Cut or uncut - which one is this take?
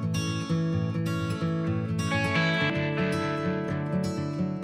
cut